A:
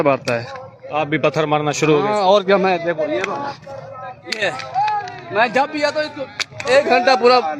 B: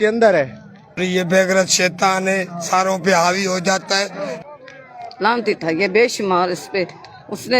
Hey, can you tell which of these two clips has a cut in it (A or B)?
B